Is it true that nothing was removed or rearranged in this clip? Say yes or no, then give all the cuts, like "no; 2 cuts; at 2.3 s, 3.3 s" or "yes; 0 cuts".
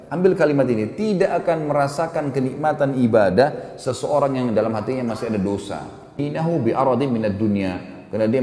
no; 1 cut; at 6.2 s